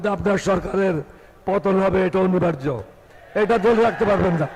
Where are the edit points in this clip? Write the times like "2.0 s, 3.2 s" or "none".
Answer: none